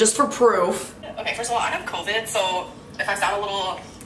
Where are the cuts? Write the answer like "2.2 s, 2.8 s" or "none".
1.0 s

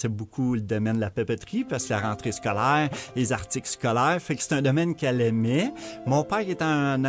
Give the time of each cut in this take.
none

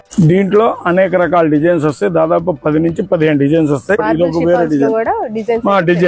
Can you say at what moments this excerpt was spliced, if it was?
4.0 s

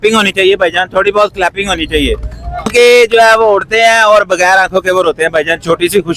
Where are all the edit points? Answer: 2.7 s

